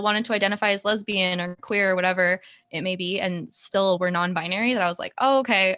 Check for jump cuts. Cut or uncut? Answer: uncut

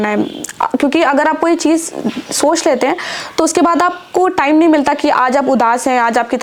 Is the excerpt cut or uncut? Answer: uncut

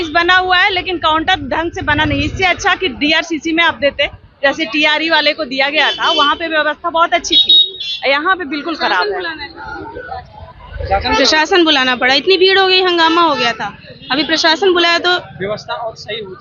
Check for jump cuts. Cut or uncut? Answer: uncut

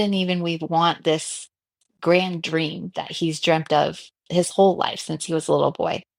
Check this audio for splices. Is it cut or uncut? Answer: uncut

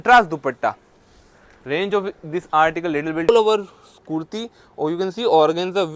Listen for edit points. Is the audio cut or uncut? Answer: cut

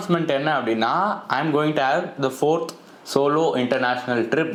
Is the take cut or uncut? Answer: uncut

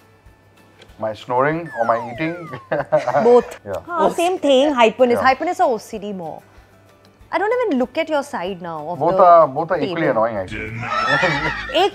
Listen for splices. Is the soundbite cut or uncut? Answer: cut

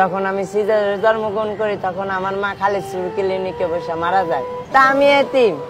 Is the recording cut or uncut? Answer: cut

